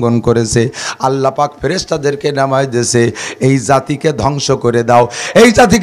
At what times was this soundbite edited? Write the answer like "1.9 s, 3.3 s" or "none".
none